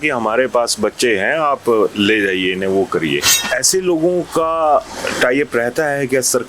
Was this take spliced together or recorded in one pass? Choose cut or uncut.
cut